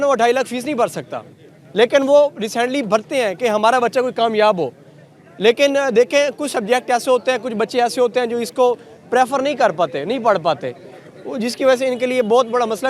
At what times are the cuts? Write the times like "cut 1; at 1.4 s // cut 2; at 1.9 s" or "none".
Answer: none